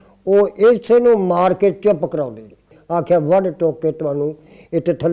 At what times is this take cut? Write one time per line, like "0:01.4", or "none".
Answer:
0:02.8